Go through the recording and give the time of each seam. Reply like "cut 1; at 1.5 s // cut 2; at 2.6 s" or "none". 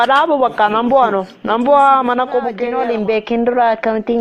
cut 1; at 2.7 s